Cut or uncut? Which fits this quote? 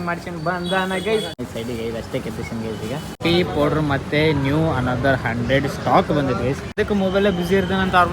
cut